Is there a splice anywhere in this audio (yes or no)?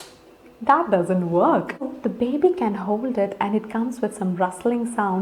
yes